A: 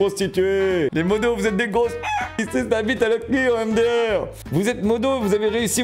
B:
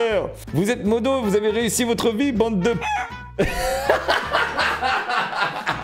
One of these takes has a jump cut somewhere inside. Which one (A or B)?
A